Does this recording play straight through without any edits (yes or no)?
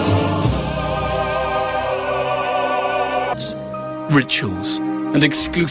yes